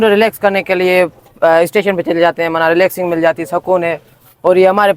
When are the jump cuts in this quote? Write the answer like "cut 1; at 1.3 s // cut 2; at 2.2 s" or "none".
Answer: none